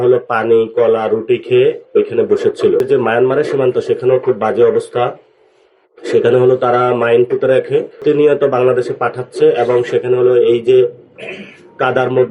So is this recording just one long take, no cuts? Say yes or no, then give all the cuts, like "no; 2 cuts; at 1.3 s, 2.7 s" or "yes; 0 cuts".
no; 2 cuts; at 2.8 s, 8.0 s